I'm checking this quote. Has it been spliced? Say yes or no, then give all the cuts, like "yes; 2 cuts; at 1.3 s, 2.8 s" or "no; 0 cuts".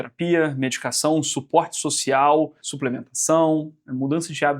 yes; 1 cut; at 2.7 s